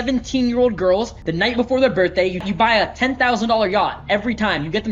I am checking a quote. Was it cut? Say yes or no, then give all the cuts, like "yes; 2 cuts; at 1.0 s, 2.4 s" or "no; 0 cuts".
yes; 2 cuts; at 1.2 s, 2.5 s